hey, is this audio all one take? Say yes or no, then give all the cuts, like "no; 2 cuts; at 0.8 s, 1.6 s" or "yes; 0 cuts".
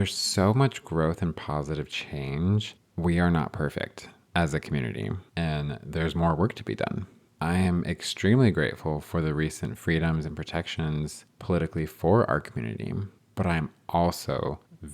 yes; 0 cuts